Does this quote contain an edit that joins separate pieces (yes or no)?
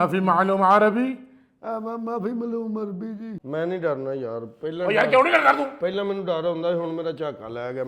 yes